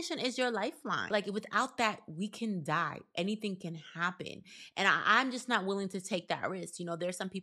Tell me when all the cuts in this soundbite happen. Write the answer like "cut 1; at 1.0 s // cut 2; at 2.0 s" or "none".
cut 1; at 1.1 s